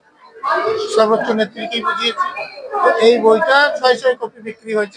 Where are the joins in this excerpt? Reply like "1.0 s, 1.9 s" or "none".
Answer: none